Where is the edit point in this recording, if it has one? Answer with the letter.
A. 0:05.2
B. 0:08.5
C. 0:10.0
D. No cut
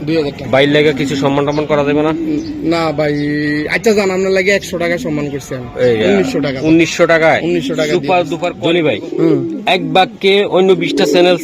B